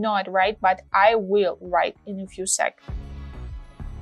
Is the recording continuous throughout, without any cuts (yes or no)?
yes